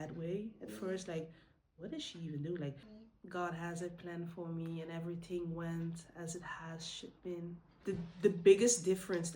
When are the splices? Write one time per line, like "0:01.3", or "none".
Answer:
0:02.8
0:07.7